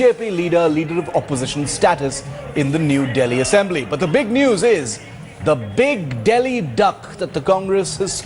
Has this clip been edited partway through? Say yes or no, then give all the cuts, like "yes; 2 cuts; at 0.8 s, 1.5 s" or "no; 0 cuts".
no; 0 cuts